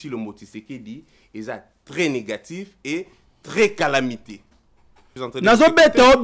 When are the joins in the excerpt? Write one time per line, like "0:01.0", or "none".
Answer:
0:05.1